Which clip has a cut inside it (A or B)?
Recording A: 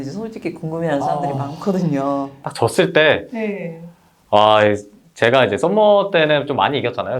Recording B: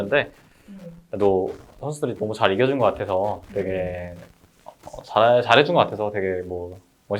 A